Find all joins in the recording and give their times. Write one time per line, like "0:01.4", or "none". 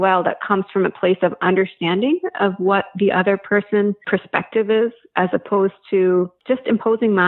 0:04.0
0:06.4